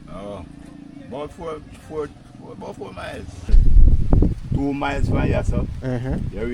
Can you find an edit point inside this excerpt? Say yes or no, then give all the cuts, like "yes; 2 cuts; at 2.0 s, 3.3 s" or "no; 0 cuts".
yes; 1 cut; at 3.6 s